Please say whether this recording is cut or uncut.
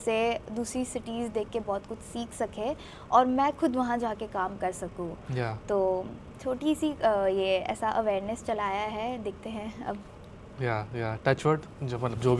uncut